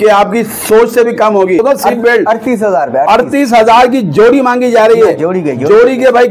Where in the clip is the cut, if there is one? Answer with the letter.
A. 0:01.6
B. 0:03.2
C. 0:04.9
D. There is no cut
A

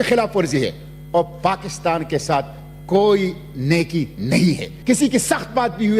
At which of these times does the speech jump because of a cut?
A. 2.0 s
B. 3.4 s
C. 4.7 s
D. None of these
C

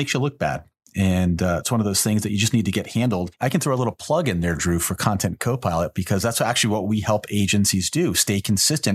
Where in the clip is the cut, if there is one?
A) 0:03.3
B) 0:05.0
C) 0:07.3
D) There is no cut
A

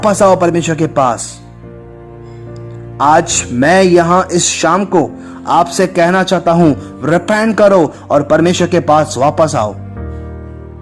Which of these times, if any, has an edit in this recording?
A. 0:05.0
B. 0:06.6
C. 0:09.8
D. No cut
C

